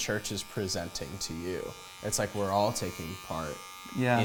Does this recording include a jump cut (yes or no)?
no